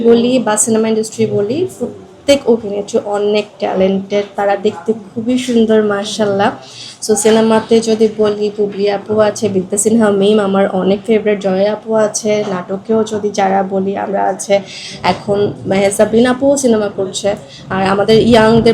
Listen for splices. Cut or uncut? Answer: uncut